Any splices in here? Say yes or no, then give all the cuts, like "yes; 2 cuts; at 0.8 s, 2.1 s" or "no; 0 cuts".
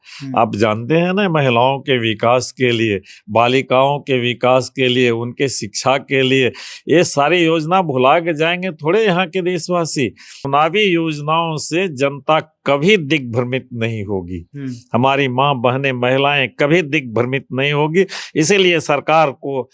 yes; 1 cut; at 10.4 s